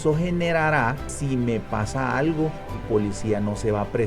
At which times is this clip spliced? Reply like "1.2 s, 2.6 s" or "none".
1.1 s, 2.8 s